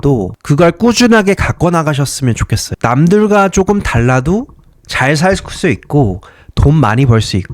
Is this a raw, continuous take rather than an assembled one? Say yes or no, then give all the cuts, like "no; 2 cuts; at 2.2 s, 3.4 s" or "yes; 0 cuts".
no; 1 cut; at 2.7 s